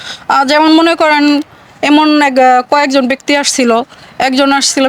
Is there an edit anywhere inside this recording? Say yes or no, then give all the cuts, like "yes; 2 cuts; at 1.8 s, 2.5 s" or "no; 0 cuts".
no; 0 cuts